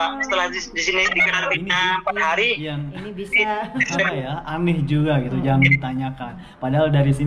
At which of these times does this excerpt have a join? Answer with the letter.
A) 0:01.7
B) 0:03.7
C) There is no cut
C